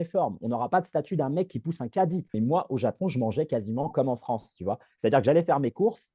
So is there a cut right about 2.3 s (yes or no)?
yes